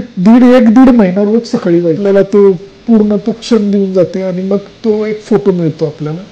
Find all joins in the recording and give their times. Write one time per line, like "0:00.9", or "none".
0:02.0